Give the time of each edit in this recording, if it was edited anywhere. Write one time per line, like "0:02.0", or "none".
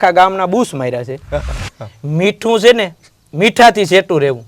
0:01.6